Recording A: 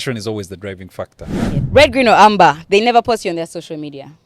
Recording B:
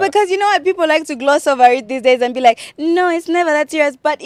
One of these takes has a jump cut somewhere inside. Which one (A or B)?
A